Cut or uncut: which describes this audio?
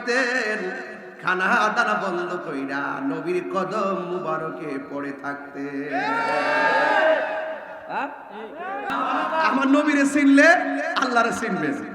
cut